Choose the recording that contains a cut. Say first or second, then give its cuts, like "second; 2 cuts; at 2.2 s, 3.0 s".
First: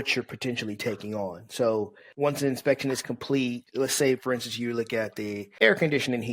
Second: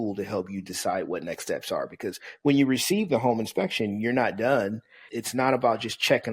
first; 3 cuts; at 2.0 s, 3.6 s, 5.4 s